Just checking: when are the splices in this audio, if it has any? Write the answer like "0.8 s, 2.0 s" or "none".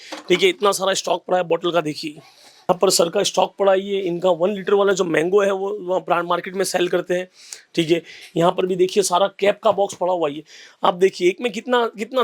none